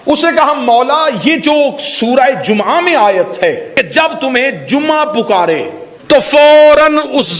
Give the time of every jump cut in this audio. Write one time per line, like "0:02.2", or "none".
0:03.7
0:05.9